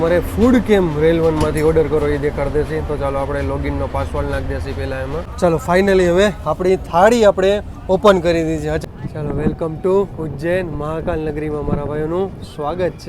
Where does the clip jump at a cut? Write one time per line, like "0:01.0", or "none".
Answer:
0:05.3
0:08.8